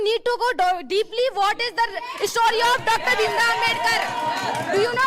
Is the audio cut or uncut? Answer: uncut